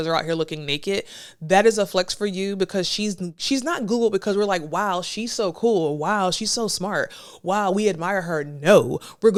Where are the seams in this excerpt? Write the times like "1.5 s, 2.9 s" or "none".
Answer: none